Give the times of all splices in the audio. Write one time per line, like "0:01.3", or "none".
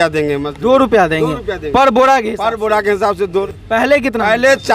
0:03.4